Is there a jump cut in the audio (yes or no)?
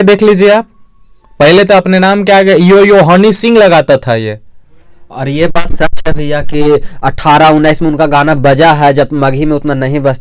no